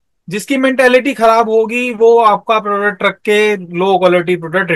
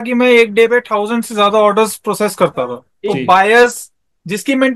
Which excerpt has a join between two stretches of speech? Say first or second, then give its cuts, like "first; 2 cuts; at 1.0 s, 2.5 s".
second; 1 cut; at 2.9 s